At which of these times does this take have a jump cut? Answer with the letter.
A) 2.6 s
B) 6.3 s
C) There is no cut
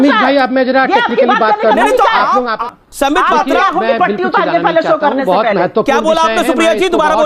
A